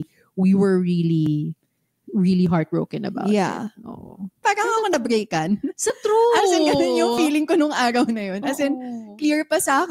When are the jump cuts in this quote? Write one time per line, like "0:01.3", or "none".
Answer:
0:04.4